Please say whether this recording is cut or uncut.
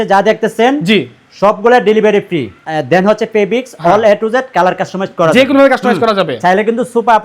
cut